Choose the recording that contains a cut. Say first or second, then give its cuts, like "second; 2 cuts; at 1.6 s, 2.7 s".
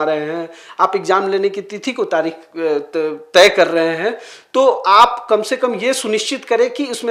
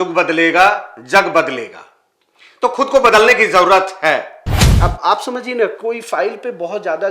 second; 1 cut; at 4.7 s